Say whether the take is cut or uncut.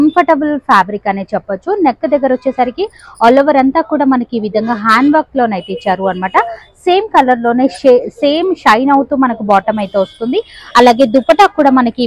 uncut